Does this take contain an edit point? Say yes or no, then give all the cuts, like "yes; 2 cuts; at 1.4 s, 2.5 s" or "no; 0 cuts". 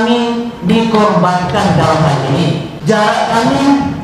yes; 1 cut; at 2.7 s